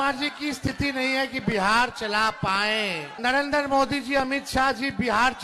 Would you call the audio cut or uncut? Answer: cut